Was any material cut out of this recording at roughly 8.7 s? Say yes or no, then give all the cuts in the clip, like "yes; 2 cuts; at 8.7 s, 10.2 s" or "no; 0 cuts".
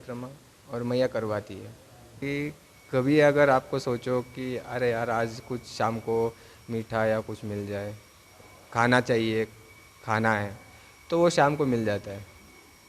no; 1 cut; at 2.2 s